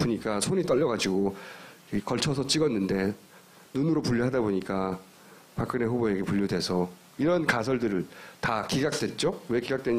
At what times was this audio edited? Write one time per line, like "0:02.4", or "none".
0:01.1